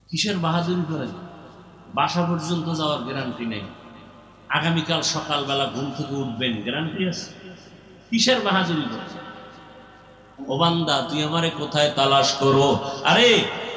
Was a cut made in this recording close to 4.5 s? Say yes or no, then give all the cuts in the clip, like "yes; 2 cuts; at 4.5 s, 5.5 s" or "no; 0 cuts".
no; 1 cut; at 10.4 s